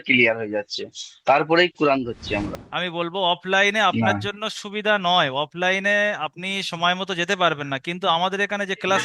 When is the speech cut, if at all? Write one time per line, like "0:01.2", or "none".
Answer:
0:02.5